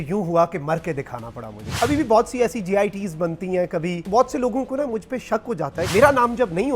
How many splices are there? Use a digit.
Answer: 3